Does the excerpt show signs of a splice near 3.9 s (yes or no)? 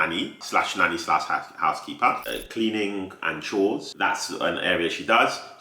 yes